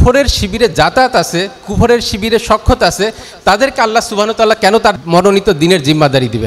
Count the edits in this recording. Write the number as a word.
one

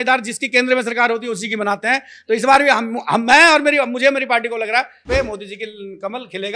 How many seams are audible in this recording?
one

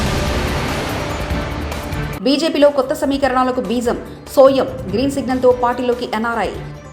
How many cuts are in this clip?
zero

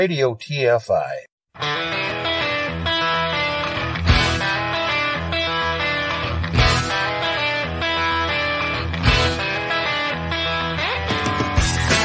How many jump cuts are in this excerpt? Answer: one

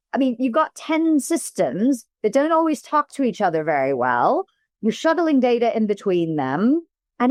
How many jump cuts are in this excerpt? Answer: zero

